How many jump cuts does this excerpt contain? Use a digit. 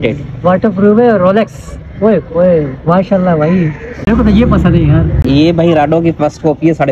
2